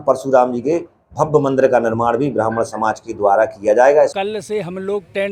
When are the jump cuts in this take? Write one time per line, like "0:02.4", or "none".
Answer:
0:04.2